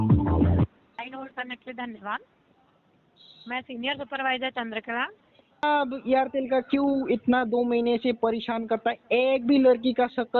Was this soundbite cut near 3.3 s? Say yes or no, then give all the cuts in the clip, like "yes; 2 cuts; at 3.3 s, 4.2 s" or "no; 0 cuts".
no; 2 cuts; at 1.0 s, 5.7 s